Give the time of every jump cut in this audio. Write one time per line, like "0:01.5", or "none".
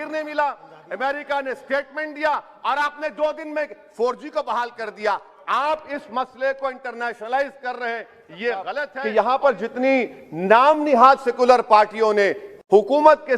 0:09.1